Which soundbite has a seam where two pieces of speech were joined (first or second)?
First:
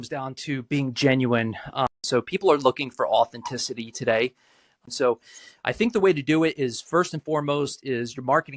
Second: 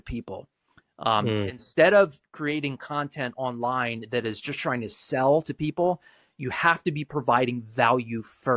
first